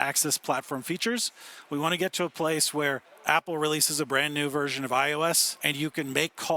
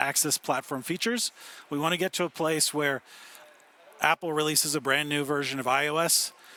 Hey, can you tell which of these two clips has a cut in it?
first; 2 cuts; at 3.1 s, 5.6 s

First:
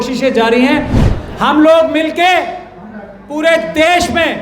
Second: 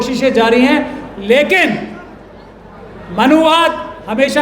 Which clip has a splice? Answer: first; 1 cut; at 1.1 s

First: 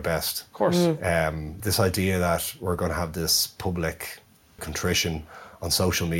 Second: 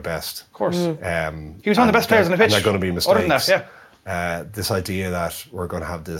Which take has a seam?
first; 2 cuts; at 1.5 s, 4.7 s

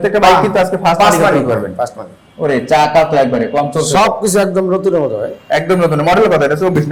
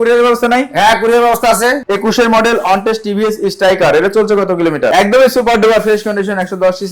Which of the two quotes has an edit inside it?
second; 2 cuts; at 1.8 s, 4.9 s

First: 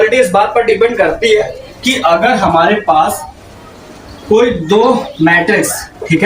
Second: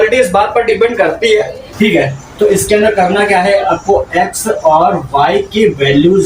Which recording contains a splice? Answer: second; 1 cut; at 1.6 s

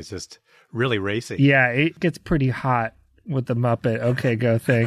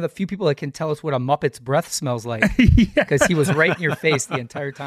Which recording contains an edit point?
first; 1 cut; at 2.0 s

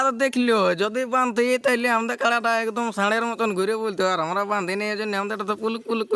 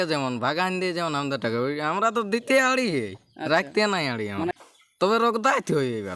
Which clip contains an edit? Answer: second; 1 cut; at 4.5 s

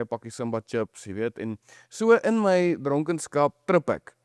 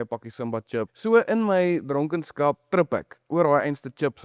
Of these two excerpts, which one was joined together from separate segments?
second; 2 cuts; at 0.9 s, 3.2 s

